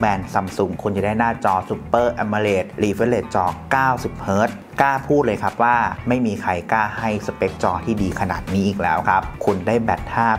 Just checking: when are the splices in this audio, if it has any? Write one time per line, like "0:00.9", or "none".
0:02.7